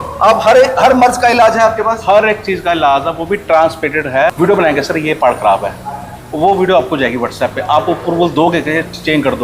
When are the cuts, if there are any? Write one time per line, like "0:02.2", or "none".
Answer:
0:04.3